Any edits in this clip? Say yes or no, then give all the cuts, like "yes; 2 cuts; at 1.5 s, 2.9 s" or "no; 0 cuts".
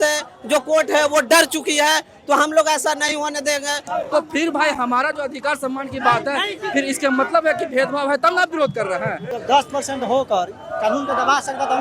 yes; 2 cuts; at 3.8 s, 9.3 s